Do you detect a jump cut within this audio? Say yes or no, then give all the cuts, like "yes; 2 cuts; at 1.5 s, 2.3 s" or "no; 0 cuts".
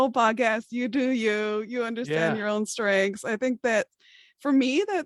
no; 0 cuts